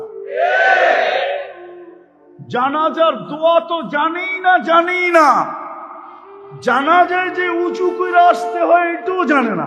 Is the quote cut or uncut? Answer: uncut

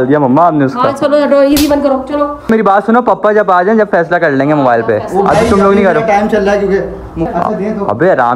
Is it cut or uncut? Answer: cut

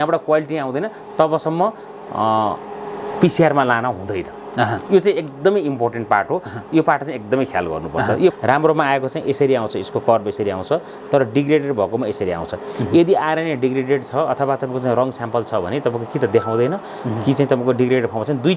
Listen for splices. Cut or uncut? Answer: cut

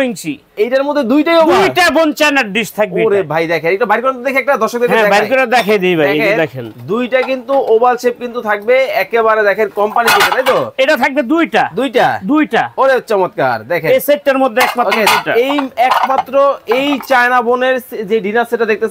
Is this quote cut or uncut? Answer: uncut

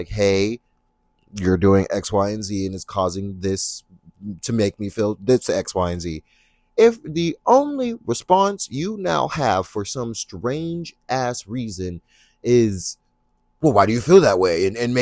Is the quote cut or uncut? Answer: uncut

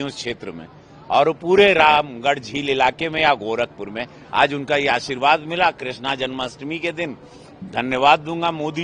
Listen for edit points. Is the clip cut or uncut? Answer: uncut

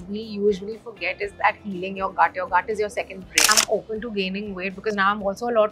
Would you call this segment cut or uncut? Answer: cut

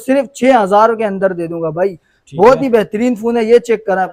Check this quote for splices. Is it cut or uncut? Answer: uncut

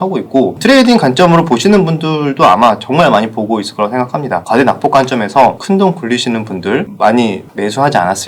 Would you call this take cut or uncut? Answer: cut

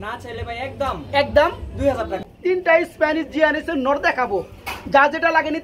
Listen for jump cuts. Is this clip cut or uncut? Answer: cut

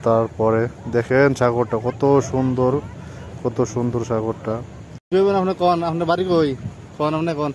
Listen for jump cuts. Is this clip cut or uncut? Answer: cut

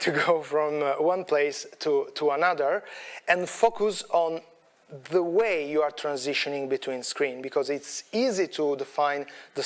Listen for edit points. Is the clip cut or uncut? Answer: uncut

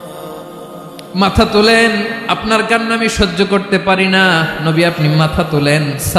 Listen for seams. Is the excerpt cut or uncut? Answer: cut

